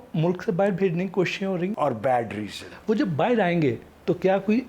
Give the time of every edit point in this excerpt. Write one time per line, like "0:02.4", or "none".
0:01.7